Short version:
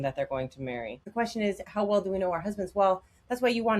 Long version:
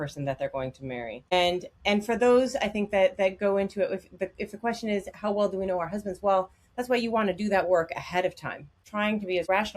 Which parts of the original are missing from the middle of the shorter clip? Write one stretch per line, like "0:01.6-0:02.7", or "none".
0:01.2-0:04.4